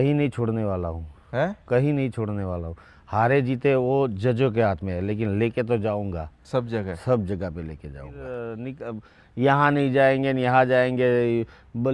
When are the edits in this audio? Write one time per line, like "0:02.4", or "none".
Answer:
0:08.2